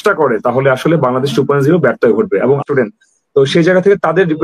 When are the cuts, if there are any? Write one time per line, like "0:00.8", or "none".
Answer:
0:02.6